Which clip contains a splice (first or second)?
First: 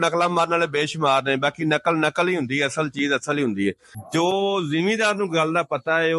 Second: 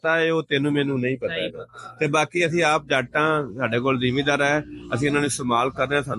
first